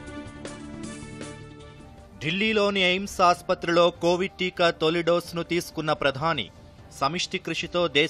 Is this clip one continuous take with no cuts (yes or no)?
yes